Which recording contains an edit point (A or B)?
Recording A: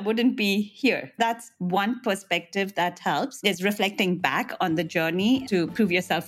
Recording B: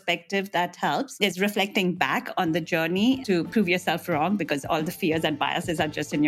A